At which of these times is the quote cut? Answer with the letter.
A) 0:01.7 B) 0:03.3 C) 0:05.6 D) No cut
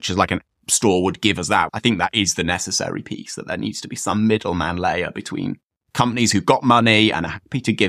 A